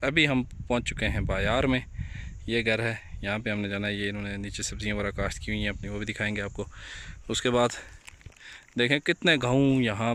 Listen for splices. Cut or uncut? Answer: uncut